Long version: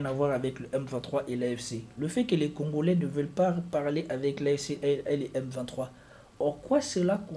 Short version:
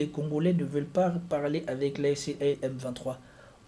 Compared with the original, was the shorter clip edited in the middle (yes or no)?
yes